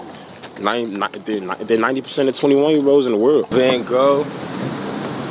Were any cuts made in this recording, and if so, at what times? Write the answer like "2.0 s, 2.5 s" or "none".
3.5 s